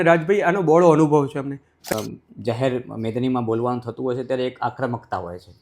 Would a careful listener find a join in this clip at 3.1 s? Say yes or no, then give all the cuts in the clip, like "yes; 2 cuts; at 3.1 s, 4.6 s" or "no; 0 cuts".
no; 1 cut; at 1.9 s